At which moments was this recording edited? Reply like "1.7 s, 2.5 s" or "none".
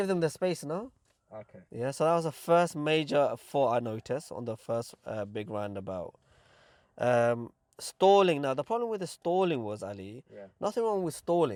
none